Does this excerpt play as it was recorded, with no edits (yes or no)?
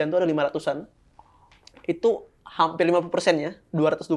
yes